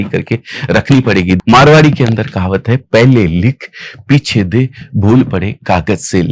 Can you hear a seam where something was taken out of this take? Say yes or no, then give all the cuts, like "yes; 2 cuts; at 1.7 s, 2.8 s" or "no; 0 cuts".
yes; 1 cut; at 1.4 s